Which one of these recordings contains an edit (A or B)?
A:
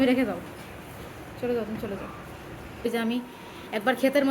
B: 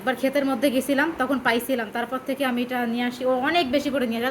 A